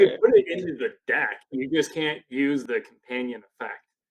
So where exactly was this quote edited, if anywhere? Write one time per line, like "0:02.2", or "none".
0:02.6